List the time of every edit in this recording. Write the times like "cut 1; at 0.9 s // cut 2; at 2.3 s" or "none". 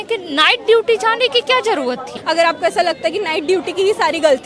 cut 1; at 2.1 s